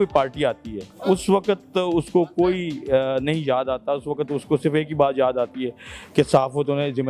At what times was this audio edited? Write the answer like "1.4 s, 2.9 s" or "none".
none